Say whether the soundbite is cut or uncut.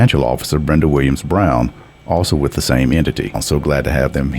cut